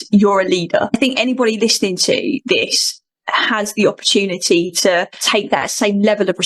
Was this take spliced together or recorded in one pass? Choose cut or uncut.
cut